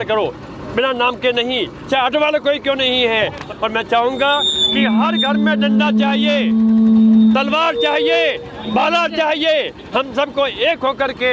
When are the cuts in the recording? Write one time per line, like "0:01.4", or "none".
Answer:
0:03.4

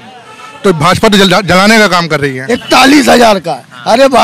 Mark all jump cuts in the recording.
0:02.6

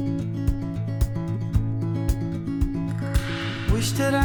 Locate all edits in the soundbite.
none

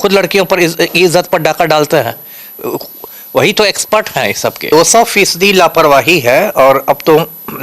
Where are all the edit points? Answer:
0:04.7

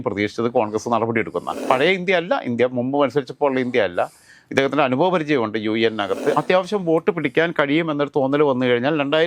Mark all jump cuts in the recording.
0:01.6
0:06.3

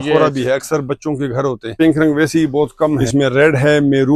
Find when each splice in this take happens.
0:01.7
0:03.1

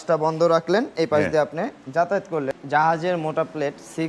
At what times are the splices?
0:02.5

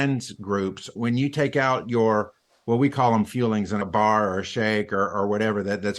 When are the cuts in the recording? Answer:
0:01.0
0:03.9

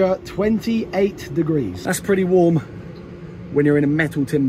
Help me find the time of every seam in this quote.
0:01.8

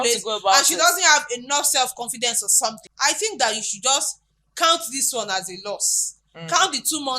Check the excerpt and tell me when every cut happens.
0:02.8

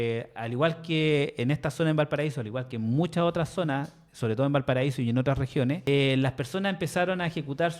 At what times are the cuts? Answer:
0:05.8

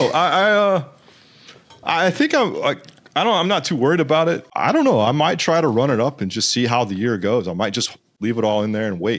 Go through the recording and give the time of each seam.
0:04.5
0:08.1

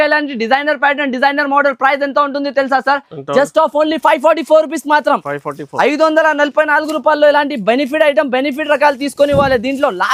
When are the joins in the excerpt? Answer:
none

